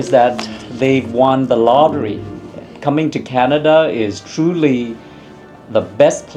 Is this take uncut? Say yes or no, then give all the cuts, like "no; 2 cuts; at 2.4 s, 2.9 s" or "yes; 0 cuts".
yes; 0 cuts